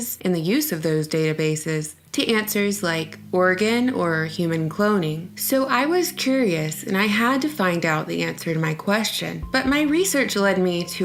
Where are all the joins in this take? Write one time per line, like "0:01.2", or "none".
none